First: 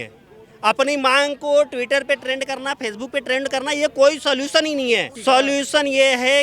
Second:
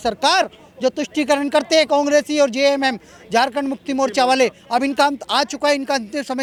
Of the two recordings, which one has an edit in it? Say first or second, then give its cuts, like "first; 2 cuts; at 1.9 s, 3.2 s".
first; 1 cut; at 5.1 s